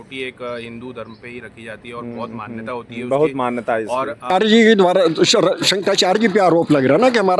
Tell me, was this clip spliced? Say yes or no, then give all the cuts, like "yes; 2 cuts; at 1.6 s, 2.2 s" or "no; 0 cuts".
yes; 1 cut; at 4.3 s